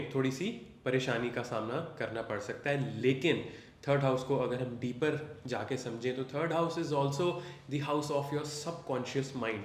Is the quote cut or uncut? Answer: uncut